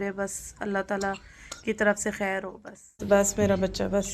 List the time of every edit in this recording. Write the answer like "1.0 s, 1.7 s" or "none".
3.0 s